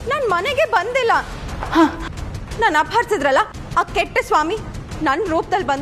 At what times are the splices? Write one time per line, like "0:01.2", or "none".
none